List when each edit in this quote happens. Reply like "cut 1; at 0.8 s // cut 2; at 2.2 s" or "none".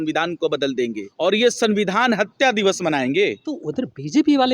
cut 1; at 1.0 s // cut 2; at 3.6 s

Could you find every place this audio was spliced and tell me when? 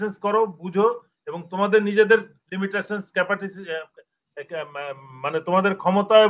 none

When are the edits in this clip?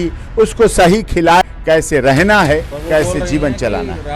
cut 1; at 1.4 s

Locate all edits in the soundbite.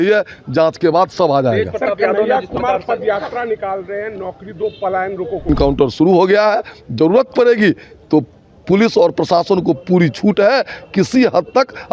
cut 1; at 5.5 s

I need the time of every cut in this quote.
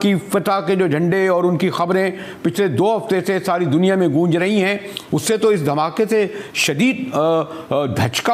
none

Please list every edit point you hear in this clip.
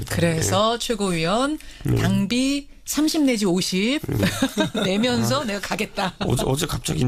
none

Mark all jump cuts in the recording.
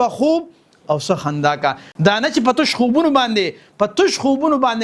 cut 1; at 1.9 s

